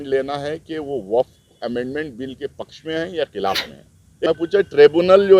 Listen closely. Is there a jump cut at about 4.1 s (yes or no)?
yes